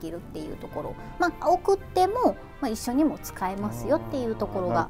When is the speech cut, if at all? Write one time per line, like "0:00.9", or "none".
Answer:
none